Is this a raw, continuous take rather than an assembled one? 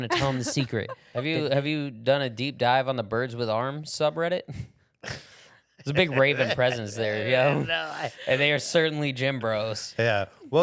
no; 1 cut; at 1.0 s

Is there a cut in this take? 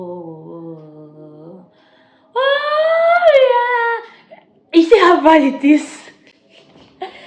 no; 0 cuts

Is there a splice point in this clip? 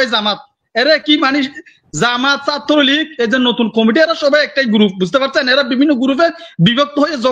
no; 0 cuts

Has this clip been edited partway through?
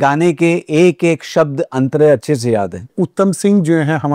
yes; 1 cut; at 2.9 s

